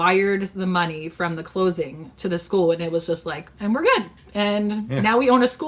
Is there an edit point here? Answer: no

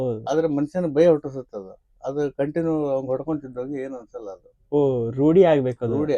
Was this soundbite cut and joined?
no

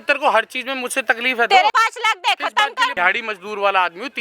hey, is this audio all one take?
no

